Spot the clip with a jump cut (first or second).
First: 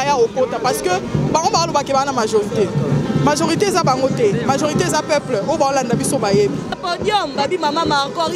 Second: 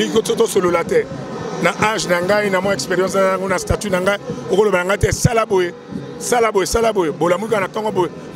first